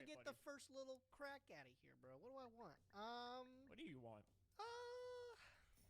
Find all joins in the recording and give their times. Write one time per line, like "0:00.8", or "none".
0:03.6